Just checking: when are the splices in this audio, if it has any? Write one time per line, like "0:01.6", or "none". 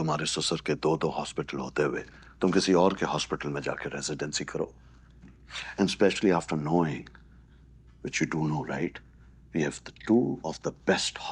none